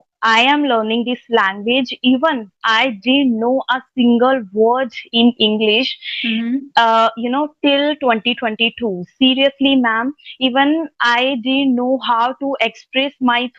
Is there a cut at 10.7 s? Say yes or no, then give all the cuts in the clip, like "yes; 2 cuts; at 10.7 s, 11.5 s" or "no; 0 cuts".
no; 0 cuts